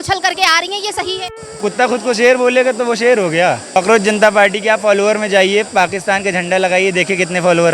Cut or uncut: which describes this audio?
cut